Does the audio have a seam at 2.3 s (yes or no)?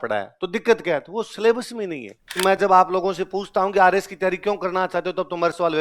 yes